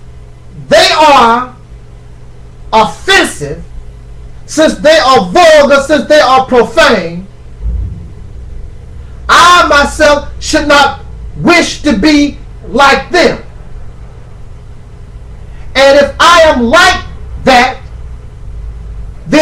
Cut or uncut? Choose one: cut